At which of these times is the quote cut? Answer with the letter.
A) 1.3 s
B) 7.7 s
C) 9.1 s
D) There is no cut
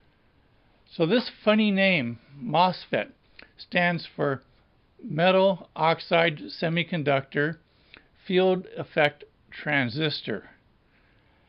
D